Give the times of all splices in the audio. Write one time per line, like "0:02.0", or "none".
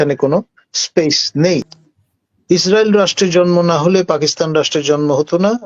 0:01.7